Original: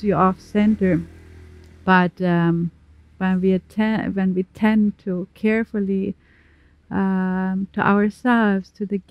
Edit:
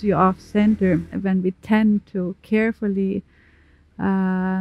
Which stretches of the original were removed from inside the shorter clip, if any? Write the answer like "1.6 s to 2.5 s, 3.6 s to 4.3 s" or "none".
1.2 s to 4.1 s